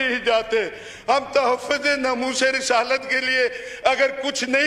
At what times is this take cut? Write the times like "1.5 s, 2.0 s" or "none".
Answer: none